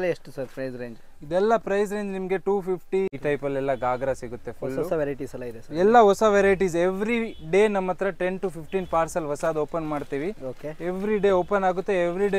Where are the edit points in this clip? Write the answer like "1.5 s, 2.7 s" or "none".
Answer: 3.1 s